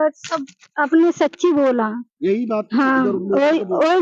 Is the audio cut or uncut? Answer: uncut